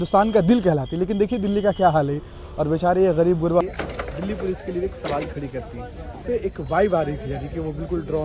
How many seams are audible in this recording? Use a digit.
2